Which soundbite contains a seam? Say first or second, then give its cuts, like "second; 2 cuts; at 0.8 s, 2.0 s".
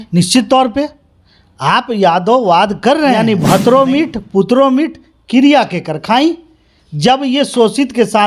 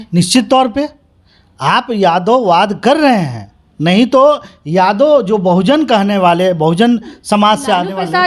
first; 1 cut; at 3.2 s